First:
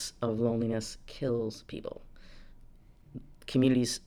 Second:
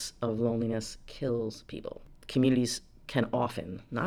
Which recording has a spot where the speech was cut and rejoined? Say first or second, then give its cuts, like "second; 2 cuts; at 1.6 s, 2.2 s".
second; 1 cut; at 2.1 s